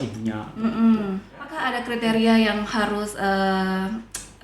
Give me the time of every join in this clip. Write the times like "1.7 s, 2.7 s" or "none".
1.7 s